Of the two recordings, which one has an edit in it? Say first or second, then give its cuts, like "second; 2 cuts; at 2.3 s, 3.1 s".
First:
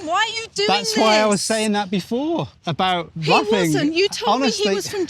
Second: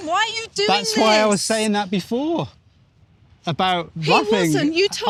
first; 1 cut; at 2.6 s